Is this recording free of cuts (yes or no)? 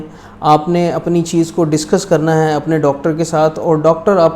yes